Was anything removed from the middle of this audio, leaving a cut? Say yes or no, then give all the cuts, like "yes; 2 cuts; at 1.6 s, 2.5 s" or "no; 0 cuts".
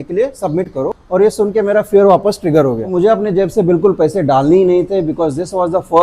yes; 2 cuts; at 1.0 s, 2.9 s